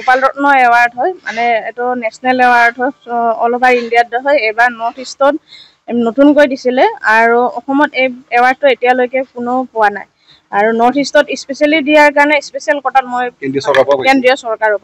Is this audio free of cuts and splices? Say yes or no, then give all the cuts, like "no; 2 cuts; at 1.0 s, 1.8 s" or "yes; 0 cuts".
yes; 0 cuts